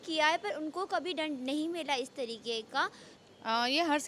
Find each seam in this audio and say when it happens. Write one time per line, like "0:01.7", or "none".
0:03.1